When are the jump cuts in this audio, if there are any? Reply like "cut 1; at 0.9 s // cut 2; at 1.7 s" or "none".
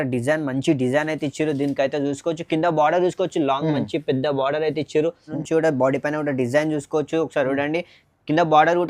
cut 1; at 5.4 s